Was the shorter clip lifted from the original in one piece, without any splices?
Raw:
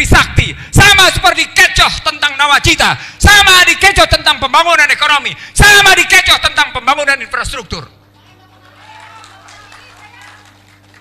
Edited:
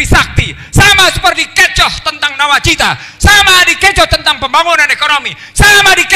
yes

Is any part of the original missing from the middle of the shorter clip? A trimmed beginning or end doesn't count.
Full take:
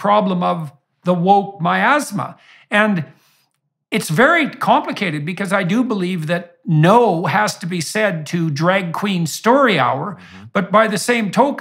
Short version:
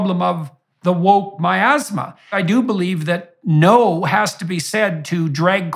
yes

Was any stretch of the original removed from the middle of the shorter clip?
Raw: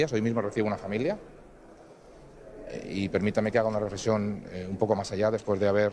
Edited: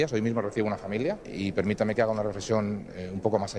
yes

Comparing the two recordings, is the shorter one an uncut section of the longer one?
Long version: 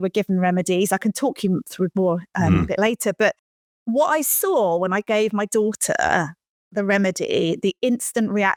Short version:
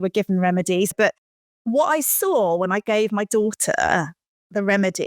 no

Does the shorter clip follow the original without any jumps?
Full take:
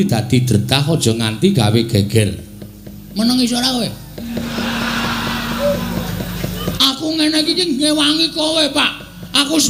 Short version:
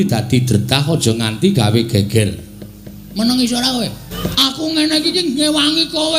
no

